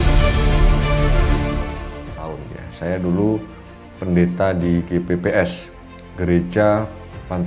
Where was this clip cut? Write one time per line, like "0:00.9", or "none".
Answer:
0:02.6